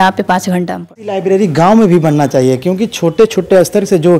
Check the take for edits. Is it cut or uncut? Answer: cut